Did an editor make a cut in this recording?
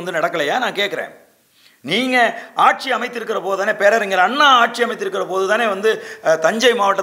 no; 0 cuts

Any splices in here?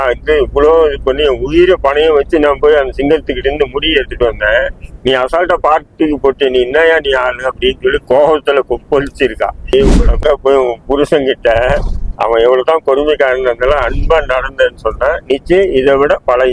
yes; 1 cut; at 9.7 s

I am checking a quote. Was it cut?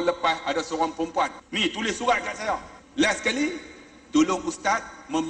yes; 2 cuts; at 1.4 s, 2.8 s

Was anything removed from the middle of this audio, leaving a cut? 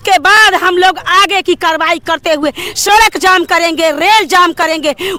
no; 0 cuts

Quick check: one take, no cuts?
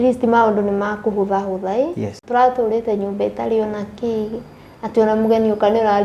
no; 1 cut; at 2.1 s

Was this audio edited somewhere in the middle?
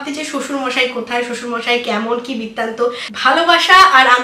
yes; 1 cut; at 3.1 s

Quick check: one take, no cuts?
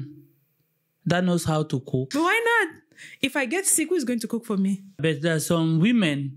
no; 2 cuts; at 2.1 s, 5.0 s

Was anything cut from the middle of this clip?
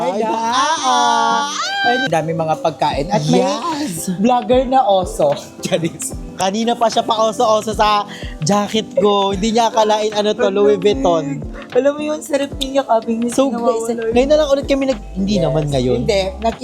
yes; 1 cut; at 2.1 s

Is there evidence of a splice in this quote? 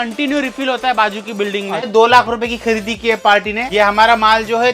yes; 2 cuts; at 1.9 s, 3.7 s

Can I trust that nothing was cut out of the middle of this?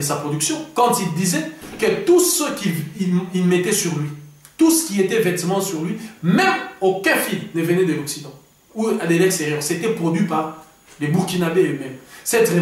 yes; 0 cuts

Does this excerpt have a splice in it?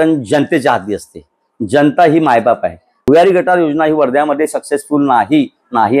yes; 1 cut; at 3.0 s

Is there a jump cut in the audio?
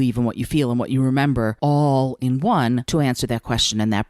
yes; 2 cuts; at 1.6 s, 2.8 s

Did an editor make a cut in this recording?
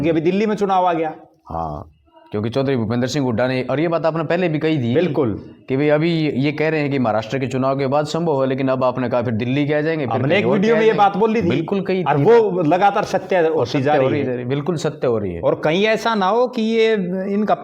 no; 0 cuts

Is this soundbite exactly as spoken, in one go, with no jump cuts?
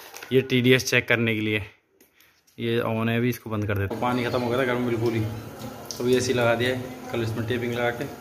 no; 1 cut; at 3.9 s

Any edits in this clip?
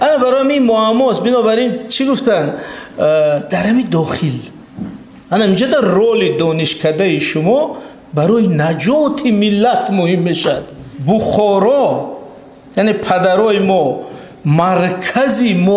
yes; 1 cut; at 10.9 s

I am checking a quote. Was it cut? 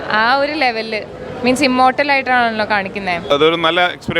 yes; 1 cut; at 3.3 s

